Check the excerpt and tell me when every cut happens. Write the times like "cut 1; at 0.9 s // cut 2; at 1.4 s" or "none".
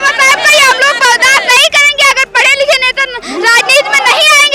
none